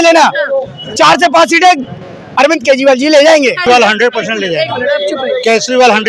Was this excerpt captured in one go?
no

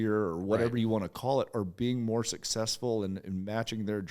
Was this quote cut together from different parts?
no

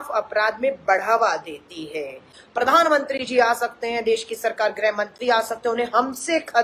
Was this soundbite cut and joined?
yes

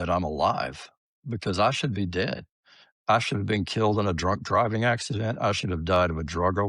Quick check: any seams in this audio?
no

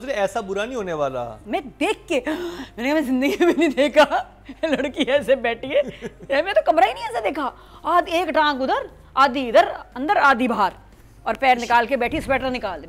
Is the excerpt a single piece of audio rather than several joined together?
no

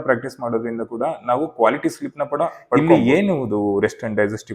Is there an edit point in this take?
yes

